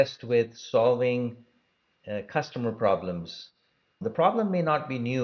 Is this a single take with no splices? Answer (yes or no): no